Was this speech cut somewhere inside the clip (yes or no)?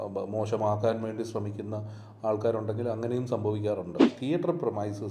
yes